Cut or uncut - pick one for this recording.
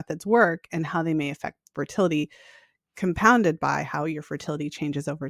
uncut